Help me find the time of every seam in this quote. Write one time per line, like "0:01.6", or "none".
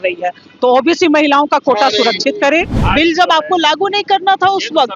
0:02.8